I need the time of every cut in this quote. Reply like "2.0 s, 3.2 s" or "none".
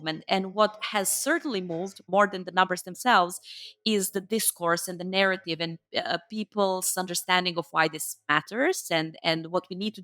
2.1 s